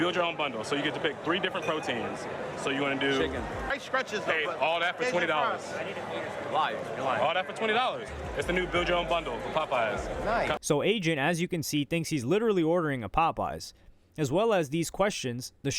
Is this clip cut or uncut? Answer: cut